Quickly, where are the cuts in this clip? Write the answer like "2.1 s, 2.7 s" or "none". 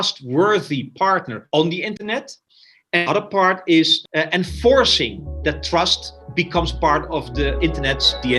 4.0 s, 6.2 s, 7.6 s